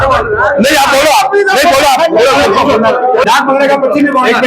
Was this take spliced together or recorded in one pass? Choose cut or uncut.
cut